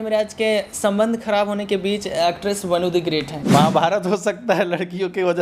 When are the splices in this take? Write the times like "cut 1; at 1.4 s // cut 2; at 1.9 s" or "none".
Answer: cut 1; at 3.4 s